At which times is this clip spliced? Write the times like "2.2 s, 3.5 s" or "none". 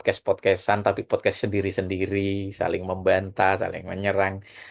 none